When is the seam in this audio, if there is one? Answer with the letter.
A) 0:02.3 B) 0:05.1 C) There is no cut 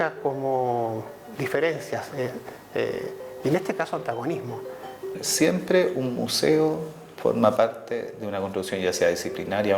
B